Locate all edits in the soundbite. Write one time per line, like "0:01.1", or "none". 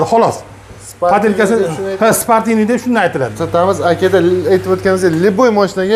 0:03.4